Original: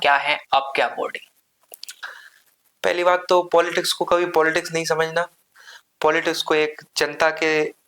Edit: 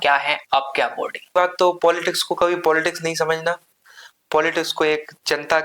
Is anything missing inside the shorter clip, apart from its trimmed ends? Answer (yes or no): yes